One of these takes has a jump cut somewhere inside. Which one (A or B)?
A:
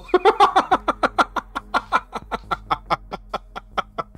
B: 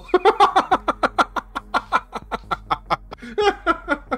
B